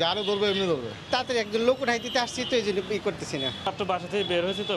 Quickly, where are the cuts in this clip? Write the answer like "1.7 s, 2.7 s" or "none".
1.0 s, 3.7 s

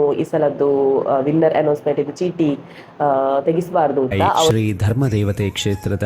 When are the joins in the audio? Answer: 4.4 s

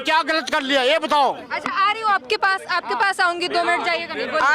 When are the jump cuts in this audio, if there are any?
none

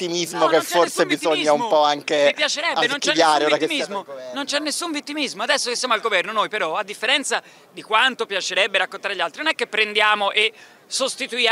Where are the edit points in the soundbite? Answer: none

